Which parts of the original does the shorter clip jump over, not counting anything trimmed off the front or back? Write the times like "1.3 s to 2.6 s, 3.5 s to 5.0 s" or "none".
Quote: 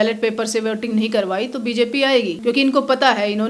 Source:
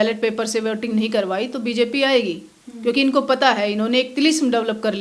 2.3 s to 2.7 s